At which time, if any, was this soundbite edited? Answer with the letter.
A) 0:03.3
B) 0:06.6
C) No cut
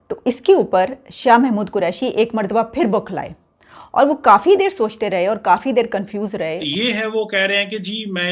B